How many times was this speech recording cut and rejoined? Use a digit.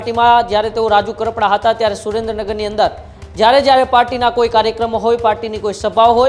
0